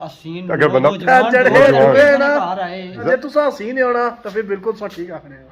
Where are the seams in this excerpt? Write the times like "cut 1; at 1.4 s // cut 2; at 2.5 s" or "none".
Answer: cut 1; at 1.0 s // cut 2; at 3.0 s